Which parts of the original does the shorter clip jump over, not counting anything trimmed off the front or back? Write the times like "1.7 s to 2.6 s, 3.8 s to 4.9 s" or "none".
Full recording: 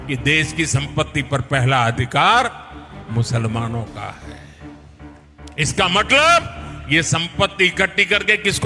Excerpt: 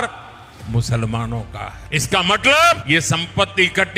4.2 s to 5.4 s, 6.5 s to 6.8 s